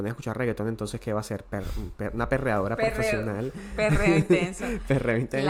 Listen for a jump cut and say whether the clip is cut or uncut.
uncut